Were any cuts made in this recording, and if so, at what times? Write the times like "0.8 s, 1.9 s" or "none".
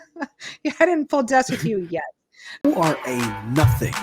2.6 s